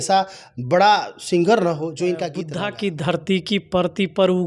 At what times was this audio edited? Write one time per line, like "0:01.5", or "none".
0:02.4